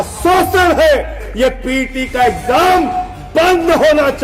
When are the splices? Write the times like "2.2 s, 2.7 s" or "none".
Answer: 1.2 s